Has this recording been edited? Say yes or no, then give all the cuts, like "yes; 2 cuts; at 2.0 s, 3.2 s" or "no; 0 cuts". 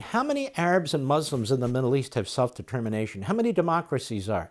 no; 0 cuts